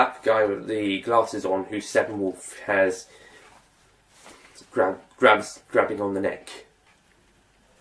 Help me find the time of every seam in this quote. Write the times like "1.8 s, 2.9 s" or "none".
6.9 s